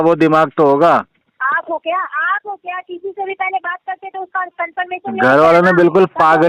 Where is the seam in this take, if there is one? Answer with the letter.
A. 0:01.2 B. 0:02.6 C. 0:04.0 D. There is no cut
D